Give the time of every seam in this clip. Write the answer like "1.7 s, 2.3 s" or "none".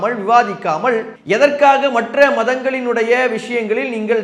1.1 s